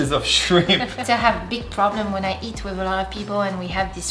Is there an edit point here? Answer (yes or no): yes